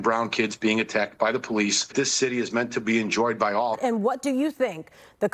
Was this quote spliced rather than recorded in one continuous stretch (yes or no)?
yes